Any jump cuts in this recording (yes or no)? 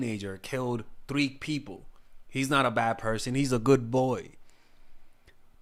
no